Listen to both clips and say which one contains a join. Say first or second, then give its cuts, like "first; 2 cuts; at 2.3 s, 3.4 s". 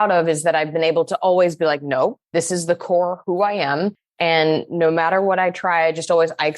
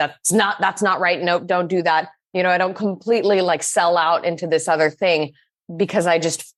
first; 1 cut; at 2.2 s